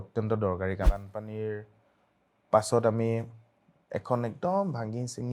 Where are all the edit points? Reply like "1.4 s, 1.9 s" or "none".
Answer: 0.9 s